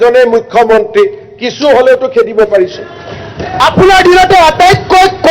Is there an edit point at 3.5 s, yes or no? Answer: yes